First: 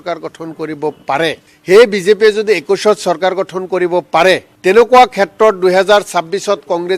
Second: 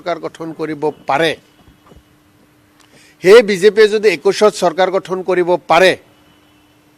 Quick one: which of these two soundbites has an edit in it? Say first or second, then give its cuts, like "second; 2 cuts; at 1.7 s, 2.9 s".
first; 2 cuts; at 1.5 s, 4.5 s